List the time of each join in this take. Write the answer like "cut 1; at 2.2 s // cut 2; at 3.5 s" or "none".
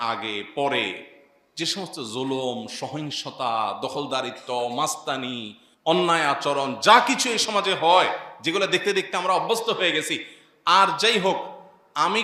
none